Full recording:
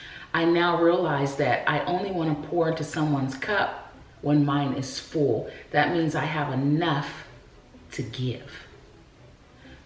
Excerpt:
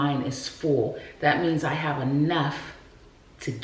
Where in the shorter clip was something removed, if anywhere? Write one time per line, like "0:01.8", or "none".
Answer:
none